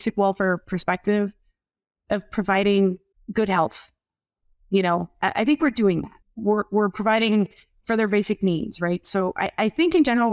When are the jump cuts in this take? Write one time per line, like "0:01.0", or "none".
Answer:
0:03.1
0:06.1